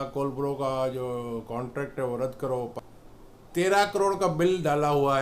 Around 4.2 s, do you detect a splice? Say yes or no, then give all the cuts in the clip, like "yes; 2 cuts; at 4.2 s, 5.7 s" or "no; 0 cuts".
no; 1 cut; at 2.7 s